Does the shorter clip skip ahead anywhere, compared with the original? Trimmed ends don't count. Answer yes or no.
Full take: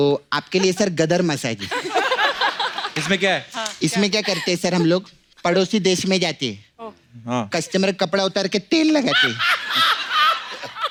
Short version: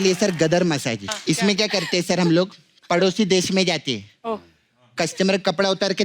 yes